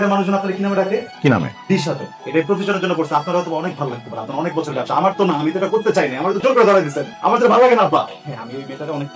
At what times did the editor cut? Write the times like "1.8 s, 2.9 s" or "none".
1.1 s, 2.1 s, 8.2 s